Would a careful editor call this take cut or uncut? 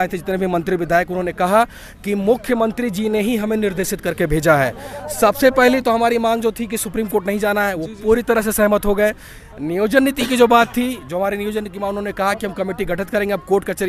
uncut